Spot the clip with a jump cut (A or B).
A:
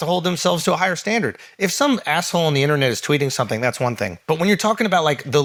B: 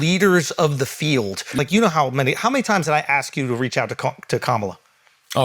B